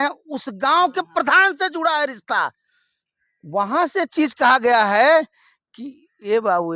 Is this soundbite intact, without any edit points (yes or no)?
yes